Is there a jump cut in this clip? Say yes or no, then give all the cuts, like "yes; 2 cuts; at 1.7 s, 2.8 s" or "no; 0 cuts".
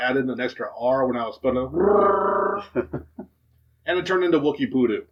no; 0 cuts